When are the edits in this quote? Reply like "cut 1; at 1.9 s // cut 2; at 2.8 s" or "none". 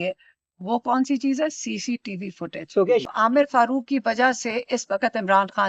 cut 1; at 3.0 s